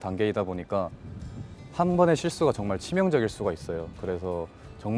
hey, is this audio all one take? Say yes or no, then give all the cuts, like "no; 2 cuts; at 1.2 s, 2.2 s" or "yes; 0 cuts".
yes; 0 cuts